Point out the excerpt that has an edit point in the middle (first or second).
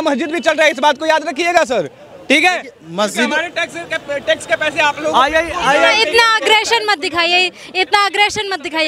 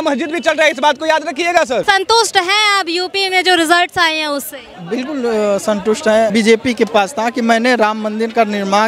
second